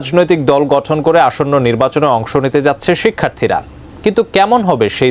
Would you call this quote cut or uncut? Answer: uncut